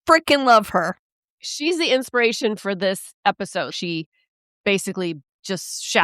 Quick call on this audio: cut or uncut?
cut